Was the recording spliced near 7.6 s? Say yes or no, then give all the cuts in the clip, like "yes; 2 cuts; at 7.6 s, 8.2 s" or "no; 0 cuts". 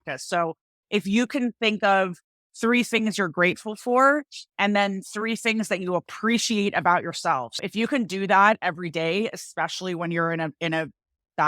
yes; 1 cut; at 7.6 s